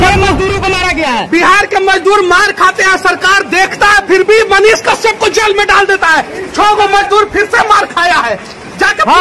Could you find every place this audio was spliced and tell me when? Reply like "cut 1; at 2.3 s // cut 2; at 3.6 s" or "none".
none